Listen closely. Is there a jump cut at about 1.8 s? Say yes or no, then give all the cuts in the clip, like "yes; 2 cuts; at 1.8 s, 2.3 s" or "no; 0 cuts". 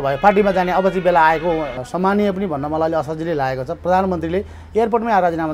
yes; 1 cut; at 1.8 s